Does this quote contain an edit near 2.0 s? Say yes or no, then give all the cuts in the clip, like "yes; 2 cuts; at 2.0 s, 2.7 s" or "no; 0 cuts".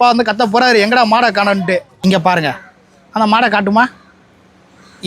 yes; 1 cut; at 2.0 s